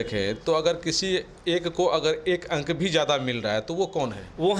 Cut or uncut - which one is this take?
uncut